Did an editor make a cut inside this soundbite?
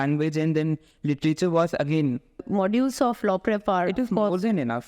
yes; 1 cut; at 2.4 s

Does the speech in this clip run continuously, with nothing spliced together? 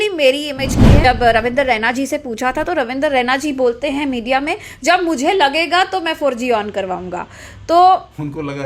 no; 1 cut; at 1.1 s

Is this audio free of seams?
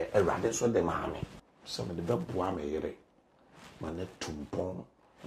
no; 1 cut; at 1.3 s

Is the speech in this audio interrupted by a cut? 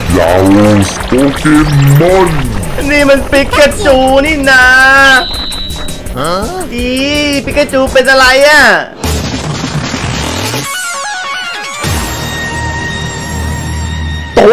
no; 0 cuts

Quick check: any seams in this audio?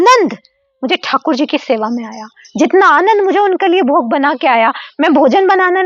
no; 0 cuts

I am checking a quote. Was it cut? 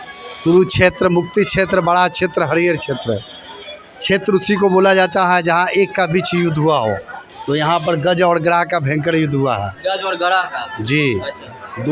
no; 0 cuts

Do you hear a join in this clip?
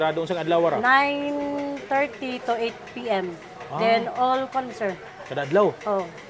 no; 0 cuts

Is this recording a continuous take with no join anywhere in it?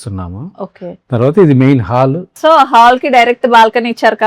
no; 1 cut; at 2.3 s

